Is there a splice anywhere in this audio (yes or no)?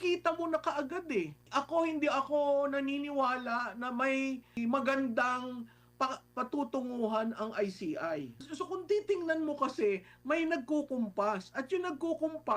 yes